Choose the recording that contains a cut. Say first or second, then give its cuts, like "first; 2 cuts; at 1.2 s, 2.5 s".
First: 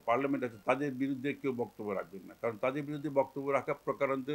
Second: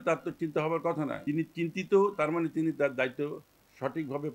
second; 1 cut; at 1.2 s